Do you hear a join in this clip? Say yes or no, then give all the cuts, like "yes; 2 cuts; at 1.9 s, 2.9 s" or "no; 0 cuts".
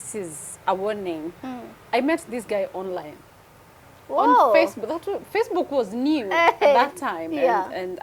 no; 0 cuts